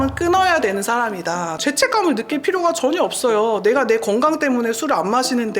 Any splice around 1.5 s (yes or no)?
yes